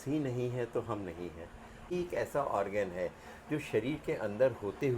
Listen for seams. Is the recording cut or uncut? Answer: cut